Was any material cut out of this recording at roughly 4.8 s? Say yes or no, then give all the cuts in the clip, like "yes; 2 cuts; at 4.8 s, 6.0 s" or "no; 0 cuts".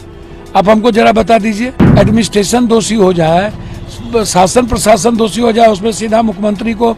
no; 1 cut; at 1.8 s